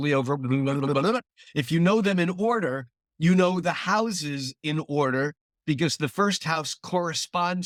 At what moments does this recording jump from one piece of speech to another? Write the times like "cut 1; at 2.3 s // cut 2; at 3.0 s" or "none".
none